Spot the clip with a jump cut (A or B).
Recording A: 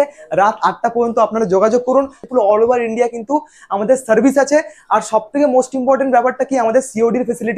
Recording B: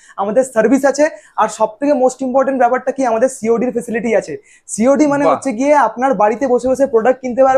A